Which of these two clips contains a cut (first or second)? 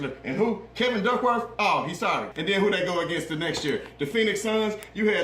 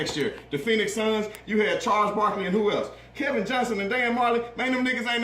first